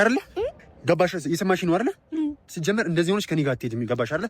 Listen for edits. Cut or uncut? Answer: uncut